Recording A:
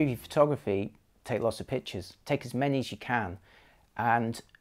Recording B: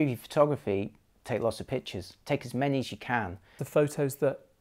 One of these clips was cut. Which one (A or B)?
B